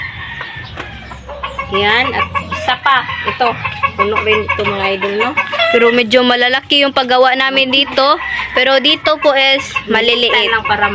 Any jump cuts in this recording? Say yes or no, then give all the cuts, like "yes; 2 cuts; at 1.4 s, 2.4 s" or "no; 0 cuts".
no; 0 cuts